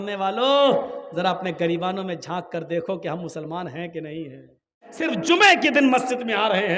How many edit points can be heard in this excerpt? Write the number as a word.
one